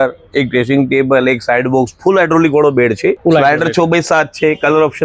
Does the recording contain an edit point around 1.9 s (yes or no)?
no